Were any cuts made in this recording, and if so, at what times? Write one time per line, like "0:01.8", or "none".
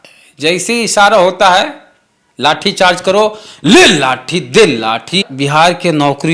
0:05.2